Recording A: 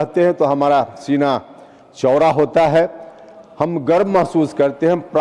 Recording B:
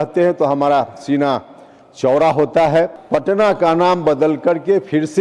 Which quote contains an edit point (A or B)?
B